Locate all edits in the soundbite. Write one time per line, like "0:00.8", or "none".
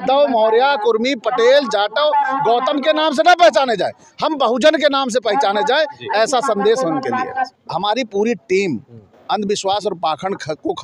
0:07.5